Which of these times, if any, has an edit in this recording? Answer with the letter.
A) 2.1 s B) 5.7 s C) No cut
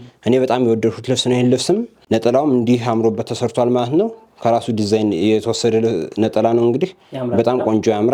C